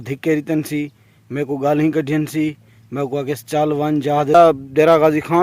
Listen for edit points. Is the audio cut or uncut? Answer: cut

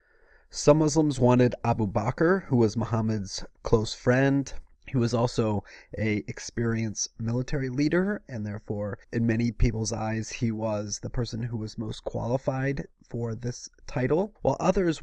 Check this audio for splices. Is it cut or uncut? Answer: uncut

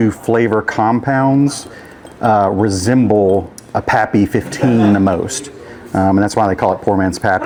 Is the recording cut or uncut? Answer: uncut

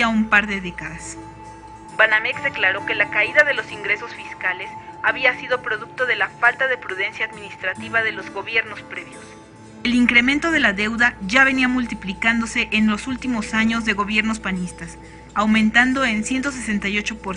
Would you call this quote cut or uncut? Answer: cut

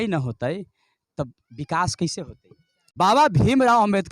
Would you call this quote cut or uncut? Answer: cut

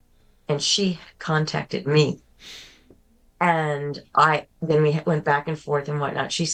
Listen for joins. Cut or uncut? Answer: uncut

